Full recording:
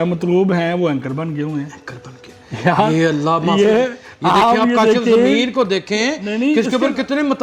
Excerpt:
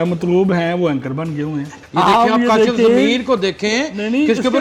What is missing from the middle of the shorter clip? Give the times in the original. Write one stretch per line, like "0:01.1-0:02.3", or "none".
0:01.8-0:04.1